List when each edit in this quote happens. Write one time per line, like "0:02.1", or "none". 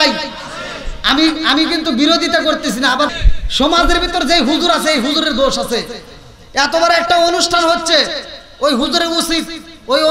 0:03.1